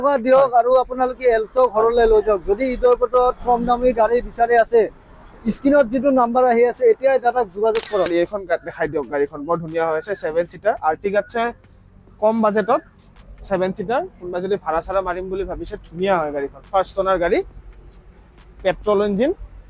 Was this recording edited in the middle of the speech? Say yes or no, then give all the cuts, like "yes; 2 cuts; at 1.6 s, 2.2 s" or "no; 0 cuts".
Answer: yes; 1 cut; at 8.1 s